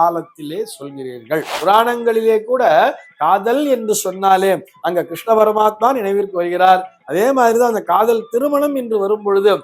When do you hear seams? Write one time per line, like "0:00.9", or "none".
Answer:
0:01.5